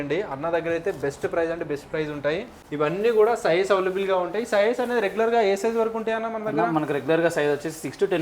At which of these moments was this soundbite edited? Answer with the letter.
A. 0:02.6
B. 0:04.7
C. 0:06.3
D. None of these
A